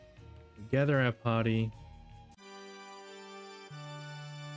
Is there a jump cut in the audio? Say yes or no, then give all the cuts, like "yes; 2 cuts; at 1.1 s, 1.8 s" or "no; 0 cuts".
no; 0 cuts